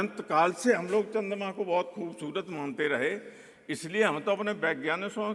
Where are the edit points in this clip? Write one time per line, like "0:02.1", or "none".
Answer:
none